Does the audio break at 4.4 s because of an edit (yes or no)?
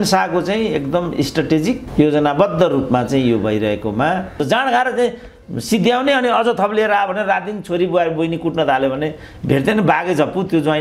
yes